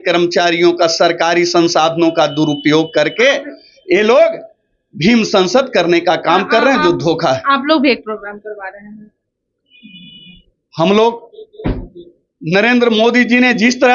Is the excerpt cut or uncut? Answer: uncut